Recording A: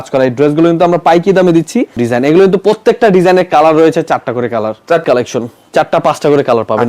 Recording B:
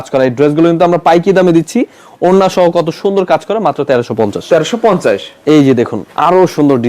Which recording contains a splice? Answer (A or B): A